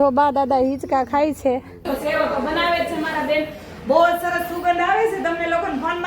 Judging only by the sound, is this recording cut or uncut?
cut